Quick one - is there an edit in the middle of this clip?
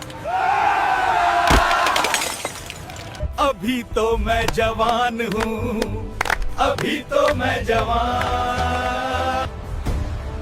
yes; 2 cuts; at 3.3 s, 9.4 s

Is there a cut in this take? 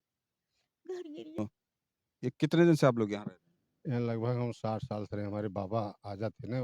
yes; 1 cut; at 1.4 s

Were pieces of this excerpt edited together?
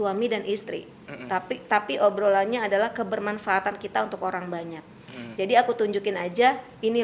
no; 0 cuts

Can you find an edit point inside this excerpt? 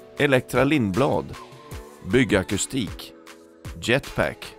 no; 0 cuts

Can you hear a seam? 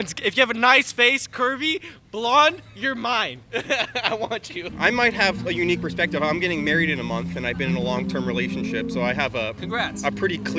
no; 0 cuts

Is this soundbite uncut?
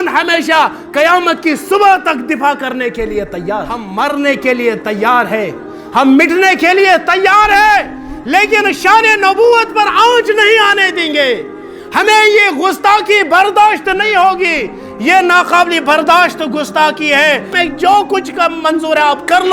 no; 2 cuts; at 3.8 s, 17.6 s

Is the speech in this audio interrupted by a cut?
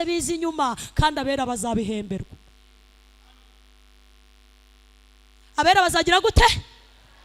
no; 0 cuts

